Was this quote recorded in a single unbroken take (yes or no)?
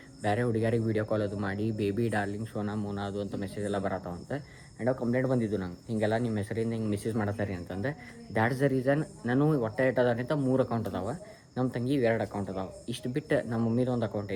yes